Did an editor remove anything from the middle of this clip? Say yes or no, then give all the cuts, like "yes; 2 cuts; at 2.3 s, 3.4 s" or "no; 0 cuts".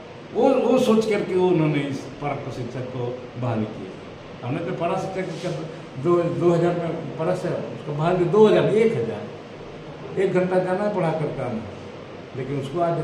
no; 0 cuts